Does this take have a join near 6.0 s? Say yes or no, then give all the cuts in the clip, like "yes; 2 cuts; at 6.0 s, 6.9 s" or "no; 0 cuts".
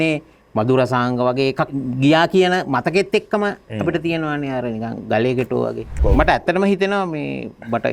yes; 2 cuts; at 1.8 s, 6.0 s